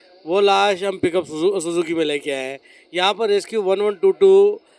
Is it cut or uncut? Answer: uncut